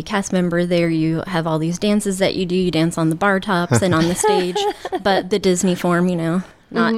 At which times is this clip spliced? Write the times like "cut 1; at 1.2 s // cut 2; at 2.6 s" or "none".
none